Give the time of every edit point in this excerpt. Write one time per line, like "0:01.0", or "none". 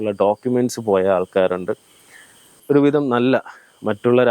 0:02.6